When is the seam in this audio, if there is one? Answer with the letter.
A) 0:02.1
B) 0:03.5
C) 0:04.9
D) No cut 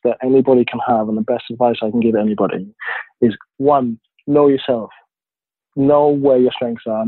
B